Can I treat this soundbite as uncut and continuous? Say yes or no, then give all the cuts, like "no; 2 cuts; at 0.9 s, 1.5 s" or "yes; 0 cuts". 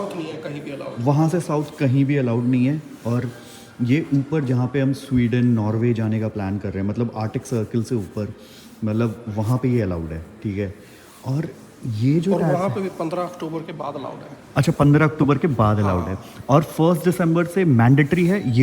yes; 0 cuts